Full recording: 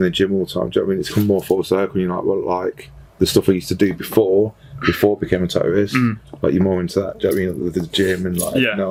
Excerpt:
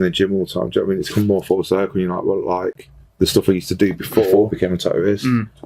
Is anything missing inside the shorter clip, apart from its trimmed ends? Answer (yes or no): yes